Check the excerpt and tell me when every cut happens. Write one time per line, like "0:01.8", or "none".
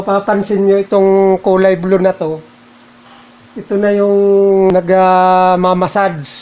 0:04.7